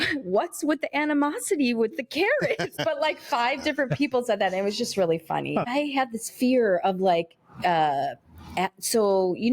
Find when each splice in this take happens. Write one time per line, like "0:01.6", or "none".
0:02.7
0:05.7